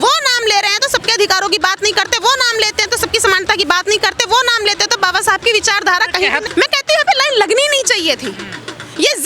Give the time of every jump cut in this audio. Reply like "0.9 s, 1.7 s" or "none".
6.4 s